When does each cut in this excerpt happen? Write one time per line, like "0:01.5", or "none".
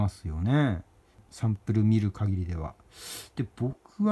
0:01.3